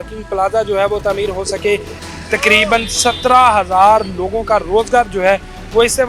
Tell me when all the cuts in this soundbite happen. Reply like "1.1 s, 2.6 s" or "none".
2.0 s